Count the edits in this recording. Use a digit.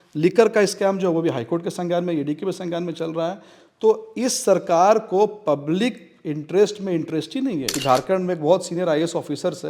1